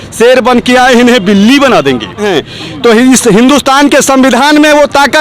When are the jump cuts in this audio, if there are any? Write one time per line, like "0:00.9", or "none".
0:02.3